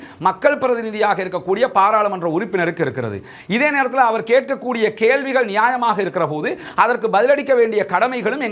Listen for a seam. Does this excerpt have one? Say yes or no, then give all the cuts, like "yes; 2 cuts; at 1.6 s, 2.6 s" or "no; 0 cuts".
no; 0 cuts